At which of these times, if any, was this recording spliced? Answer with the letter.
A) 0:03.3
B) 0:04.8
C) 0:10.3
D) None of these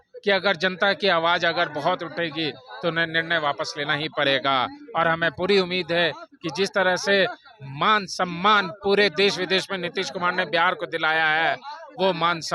D